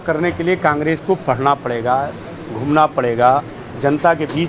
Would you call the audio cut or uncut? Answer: uncut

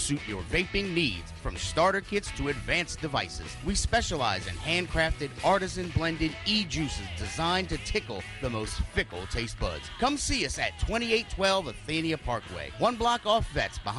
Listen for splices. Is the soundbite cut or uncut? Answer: uncut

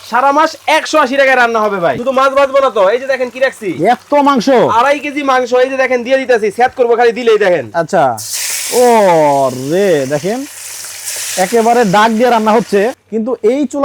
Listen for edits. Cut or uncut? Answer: cut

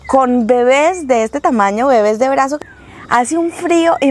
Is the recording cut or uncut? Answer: cut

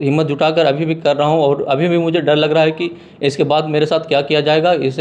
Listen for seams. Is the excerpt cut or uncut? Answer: uncut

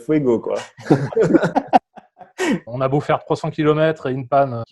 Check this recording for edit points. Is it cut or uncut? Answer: cut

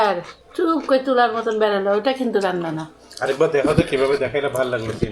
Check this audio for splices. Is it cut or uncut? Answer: uncut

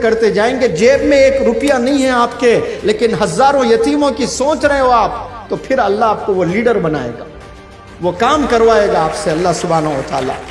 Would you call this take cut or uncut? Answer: uncut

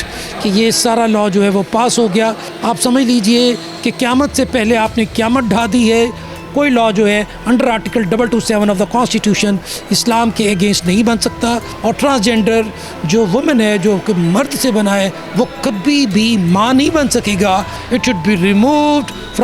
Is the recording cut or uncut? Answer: cut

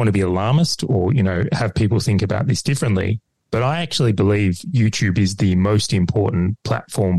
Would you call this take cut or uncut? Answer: uncut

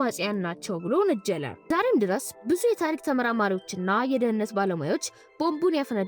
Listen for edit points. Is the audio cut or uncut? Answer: cut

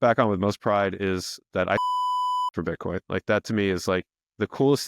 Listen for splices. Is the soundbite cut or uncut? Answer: uncut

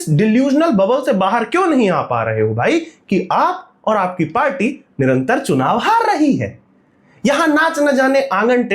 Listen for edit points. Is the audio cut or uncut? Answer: uncut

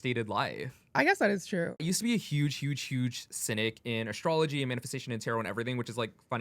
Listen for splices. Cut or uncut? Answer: cut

